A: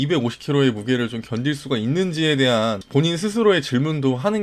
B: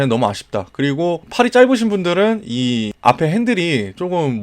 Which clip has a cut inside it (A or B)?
B